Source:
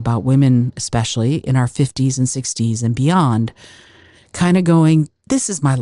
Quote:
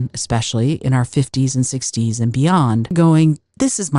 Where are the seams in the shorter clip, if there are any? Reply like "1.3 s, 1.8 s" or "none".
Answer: 2.9 s